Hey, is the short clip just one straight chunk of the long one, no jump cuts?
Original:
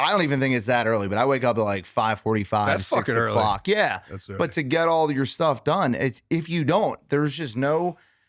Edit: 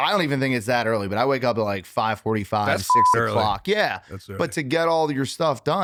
yes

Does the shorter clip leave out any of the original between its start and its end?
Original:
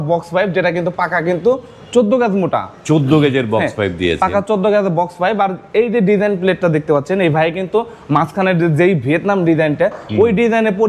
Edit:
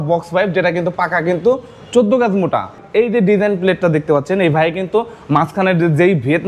yes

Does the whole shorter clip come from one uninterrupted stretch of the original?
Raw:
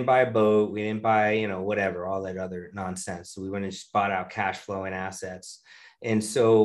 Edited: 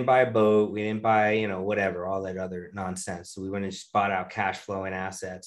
yes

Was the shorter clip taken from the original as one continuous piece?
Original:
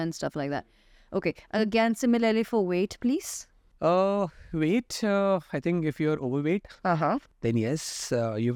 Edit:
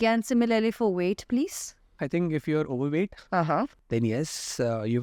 no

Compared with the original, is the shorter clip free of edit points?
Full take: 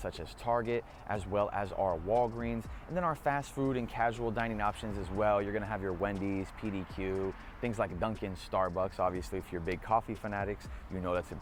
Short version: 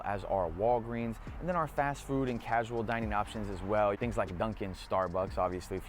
no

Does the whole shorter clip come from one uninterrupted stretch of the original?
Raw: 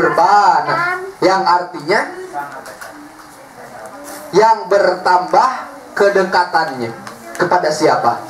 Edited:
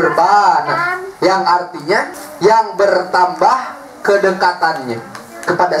no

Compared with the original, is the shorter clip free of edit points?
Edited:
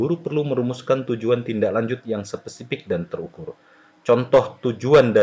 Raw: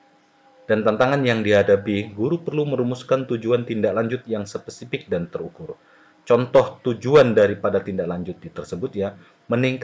yes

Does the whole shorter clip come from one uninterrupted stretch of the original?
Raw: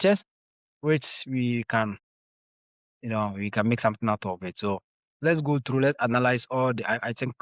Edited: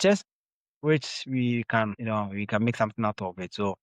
no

